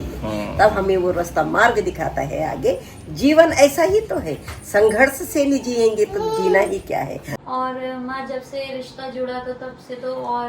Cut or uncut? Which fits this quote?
cut